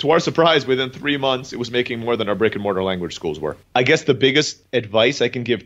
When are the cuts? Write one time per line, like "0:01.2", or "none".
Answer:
0:03.5
0:04.6